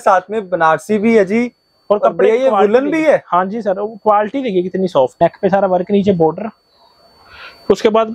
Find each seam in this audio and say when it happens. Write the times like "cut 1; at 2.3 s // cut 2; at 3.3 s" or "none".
cut 1; at 5.1 s